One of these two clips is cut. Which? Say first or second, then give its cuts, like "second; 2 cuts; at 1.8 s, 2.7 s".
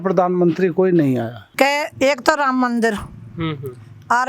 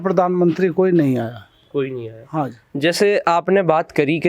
first; 1 cut; at 1.4 s